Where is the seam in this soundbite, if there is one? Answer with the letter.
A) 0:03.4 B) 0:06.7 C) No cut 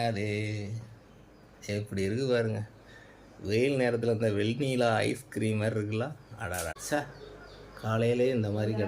B